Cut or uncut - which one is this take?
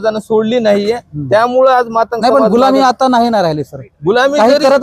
uncut